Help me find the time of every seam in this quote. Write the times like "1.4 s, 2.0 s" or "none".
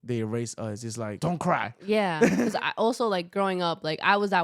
1.1 s, 2.5 s